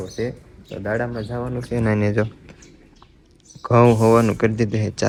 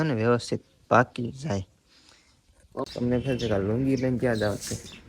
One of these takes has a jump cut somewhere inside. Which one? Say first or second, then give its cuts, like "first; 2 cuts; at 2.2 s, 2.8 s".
second; 1 cut; at 2.9 s